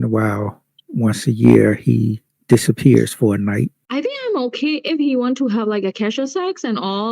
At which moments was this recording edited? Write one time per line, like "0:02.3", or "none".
0:03.8